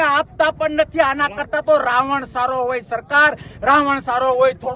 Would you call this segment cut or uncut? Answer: uncut